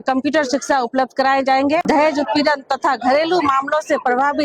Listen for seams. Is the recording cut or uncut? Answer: cut